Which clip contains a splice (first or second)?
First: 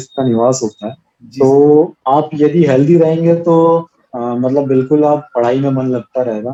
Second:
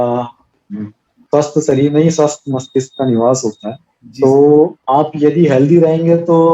second